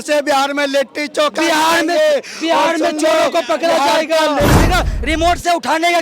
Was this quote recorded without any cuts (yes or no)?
no